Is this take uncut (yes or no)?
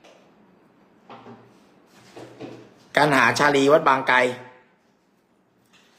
yes